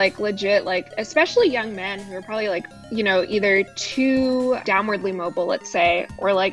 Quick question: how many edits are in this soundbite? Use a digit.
3